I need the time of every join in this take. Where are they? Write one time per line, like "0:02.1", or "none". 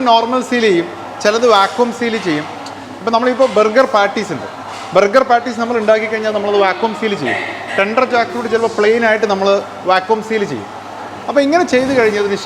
none